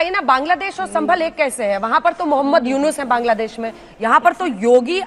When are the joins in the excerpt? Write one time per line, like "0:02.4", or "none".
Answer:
none